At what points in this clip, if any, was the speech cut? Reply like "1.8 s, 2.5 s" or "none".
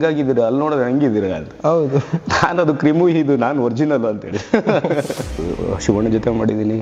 5.4 s